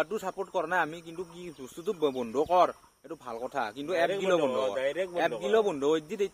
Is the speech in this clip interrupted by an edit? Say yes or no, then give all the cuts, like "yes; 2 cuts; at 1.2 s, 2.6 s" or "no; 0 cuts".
no; 0 cuts